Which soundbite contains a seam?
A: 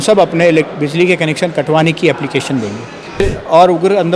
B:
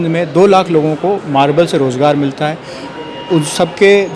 A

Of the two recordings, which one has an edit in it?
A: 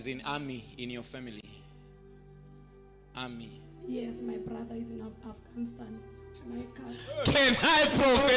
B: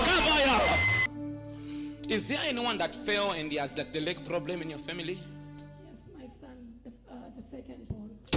B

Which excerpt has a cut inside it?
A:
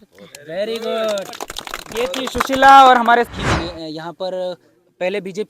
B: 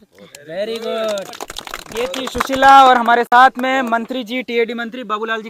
A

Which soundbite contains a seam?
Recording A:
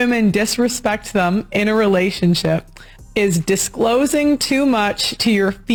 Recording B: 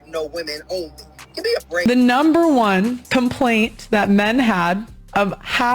B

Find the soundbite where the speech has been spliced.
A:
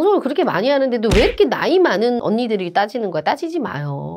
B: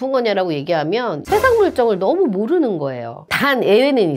B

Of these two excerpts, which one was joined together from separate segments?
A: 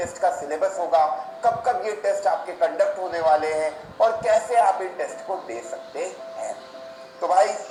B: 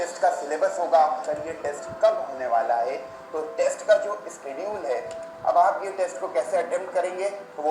B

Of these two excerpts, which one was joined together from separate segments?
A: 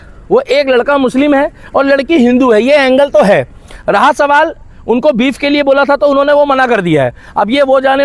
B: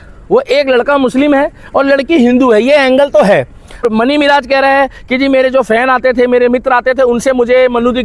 B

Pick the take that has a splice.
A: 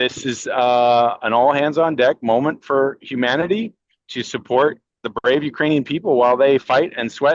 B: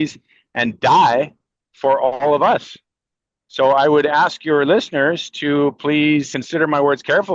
B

